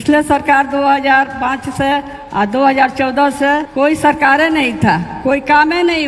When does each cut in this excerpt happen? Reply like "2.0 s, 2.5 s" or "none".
3.7 s